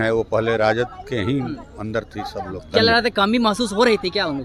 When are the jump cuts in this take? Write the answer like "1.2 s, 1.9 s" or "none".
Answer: 2.6 s